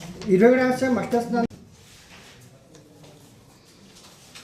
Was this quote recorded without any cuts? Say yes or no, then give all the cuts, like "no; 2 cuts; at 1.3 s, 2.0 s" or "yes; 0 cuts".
no; 1 cut; at 1.6 s